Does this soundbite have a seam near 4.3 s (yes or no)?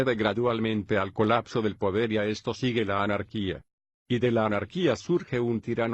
no